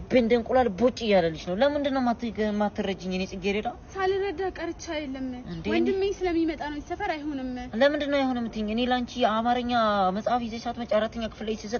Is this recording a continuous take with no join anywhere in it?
yes; 0 cuts

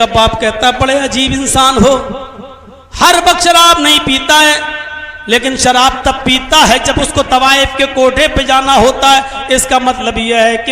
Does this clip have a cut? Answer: no; 0 cuts

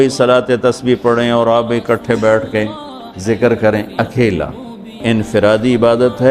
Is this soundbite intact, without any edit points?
no; 1 cut; at 5.0 s

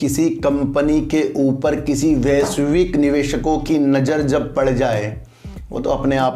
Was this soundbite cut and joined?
no; 0 cuts

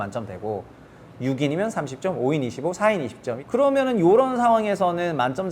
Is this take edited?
yes; 1 cut; at 3.3 s

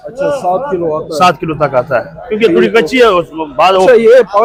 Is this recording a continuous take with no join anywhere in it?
yes; 0 cuts

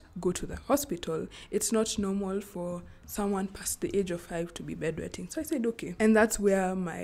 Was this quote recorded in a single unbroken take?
yes; 0 cuts

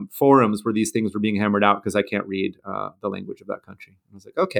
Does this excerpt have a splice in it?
no; 0 cuts

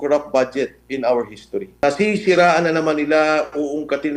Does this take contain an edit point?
yes; 1 cut; at 1.8 s

